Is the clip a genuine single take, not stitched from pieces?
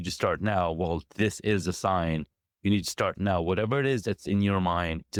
yes; 0 cuts

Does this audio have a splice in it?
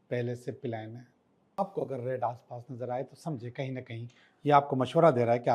yes; 1 cut; at 1.6 s

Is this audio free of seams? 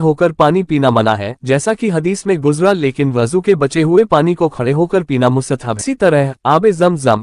no; 1 cut; at 5.8 s

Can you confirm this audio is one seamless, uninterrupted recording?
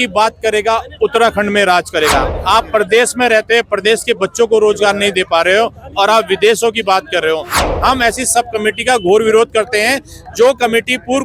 no; 2 cuts; at 2.3 s, 7.6 s

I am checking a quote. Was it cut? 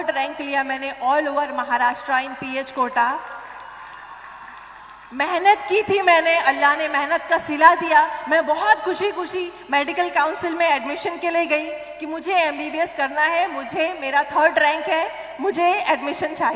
no; 0 cuts

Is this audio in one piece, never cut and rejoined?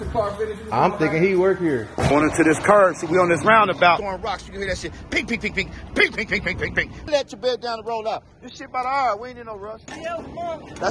no; 4 cuts; at 2.1 s, 4.0 s, 7.1 s, 9.9 s

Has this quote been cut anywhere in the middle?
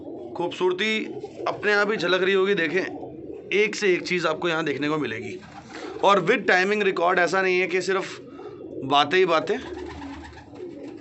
no; 0 cuts

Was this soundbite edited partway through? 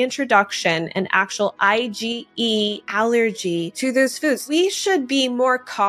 yes; 2 cuts; at 2.8 s, 4.2 s

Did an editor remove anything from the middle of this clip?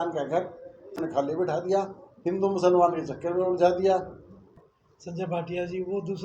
yes; 2 cuts; at 1.0 s, 4.4 s

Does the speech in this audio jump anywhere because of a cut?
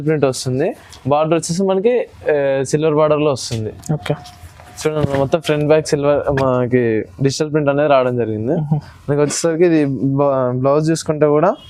no; 0 cuts

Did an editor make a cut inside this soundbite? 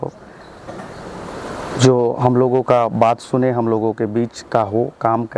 no; 0 cuts

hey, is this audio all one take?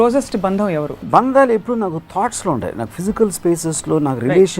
no; 1 cut; at 1.0 s

